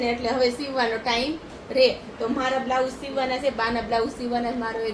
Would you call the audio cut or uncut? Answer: uncut